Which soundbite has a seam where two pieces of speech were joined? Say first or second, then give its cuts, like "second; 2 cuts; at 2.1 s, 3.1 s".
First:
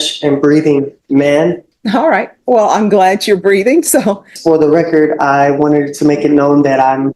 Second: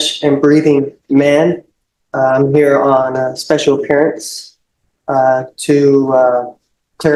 first; 2 cuts; at 1.7 s, 4.3 s